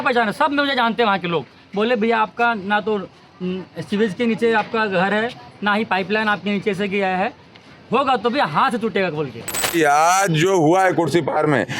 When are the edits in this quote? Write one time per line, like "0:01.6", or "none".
0:09.7